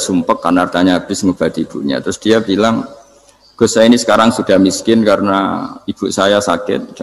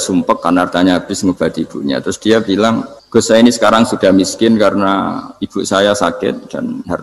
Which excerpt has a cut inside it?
second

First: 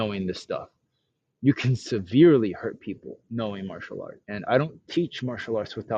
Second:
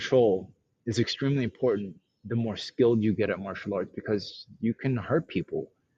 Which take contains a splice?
first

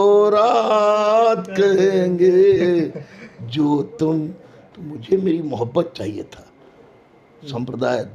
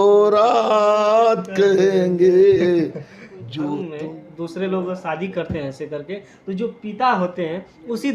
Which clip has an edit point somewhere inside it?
second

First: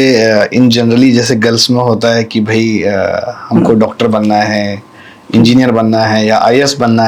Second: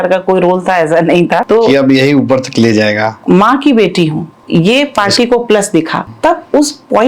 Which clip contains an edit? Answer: second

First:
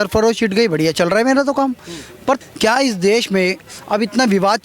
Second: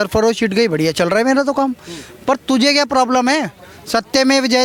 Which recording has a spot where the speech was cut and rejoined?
first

